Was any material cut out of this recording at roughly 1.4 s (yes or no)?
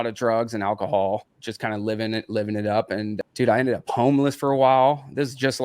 yes